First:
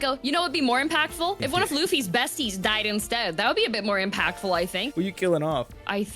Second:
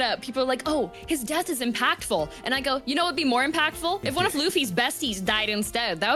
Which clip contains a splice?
first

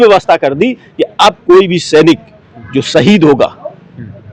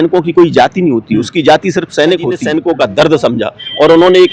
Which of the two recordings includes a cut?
second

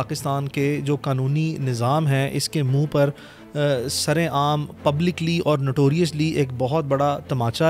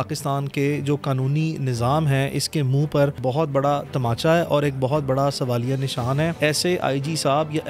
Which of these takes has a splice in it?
second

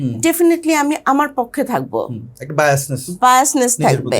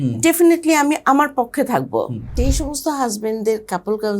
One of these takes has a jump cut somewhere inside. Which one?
second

